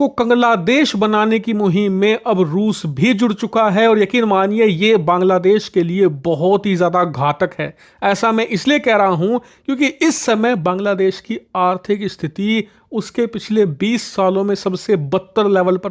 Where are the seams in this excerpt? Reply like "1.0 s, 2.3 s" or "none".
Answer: none

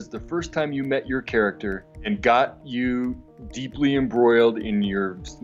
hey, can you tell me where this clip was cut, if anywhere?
1.7 s

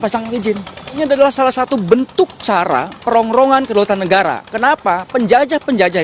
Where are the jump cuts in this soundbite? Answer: 1.0 s

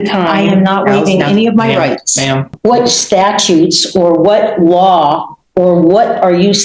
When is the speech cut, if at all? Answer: 2.5 s

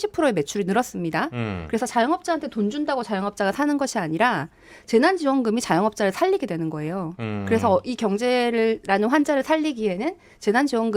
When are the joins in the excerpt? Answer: none

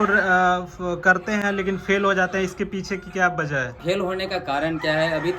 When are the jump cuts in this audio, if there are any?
3.7 s

